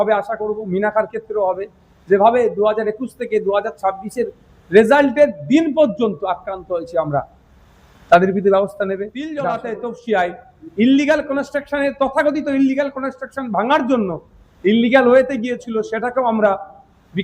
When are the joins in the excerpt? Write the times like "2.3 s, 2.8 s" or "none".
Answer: 9.5 s